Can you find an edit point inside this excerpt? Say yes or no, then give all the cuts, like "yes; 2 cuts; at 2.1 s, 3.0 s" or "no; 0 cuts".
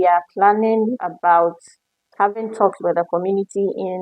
yes; 1 cut; at 1.1 s